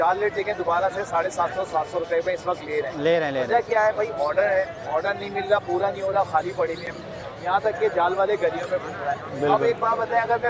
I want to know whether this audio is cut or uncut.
uncut